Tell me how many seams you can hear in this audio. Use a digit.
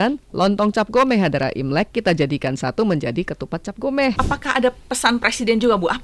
1